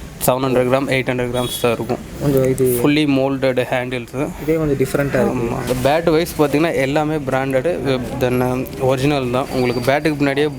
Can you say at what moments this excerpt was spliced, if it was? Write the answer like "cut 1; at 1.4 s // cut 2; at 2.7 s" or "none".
cut 1; at 5.6 s